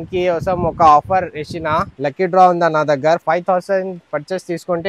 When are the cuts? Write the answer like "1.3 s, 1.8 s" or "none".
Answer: 1.9 s, 3.2 s